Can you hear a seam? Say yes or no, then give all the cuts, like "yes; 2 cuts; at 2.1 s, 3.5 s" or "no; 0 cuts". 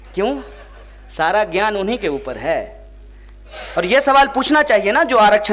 yes; 1 cut; at 3.4 s